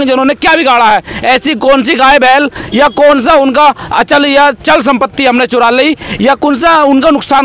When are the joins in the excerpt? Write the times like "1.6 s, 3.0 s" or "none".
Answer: none